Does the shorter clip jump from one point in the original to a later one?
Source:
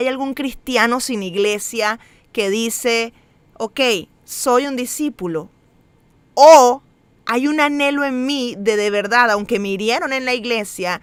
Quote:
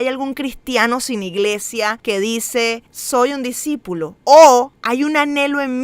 yes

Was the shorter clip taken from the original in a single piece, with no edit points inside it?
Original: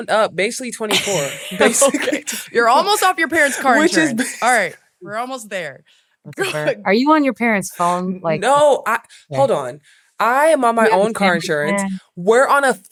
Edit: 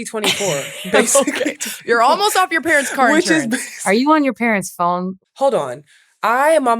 no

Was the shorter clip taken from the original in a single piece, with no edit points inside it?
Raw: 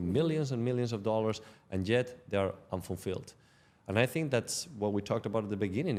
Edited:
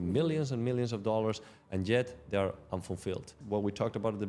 no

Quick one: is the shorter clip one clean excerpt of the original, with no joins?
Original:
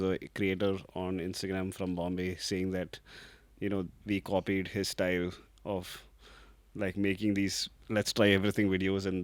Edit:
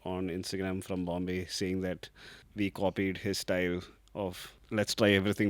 no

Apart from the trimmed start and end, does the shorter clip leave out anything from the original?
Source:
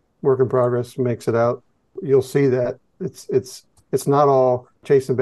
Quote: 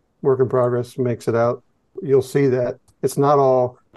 yes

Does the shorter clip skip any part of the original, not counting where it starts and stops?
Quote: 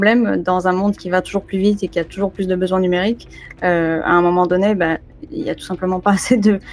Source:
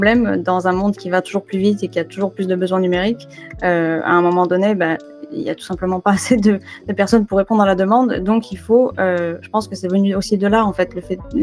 no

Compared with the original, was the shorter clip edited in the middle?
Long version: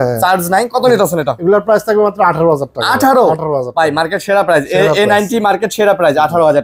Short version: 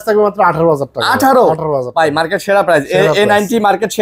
no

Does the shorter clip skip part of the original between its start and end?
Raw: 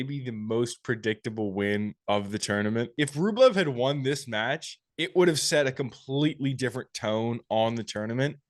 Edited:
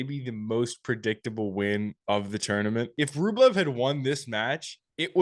no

